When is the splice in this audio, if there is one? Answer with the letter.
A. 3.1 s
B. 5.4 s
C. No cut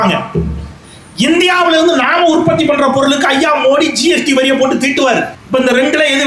B